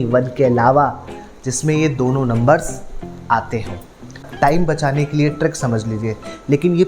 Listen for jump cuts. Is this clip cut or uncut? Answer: cut